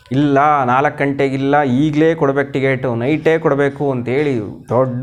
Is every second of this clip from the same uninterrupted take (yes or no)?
yes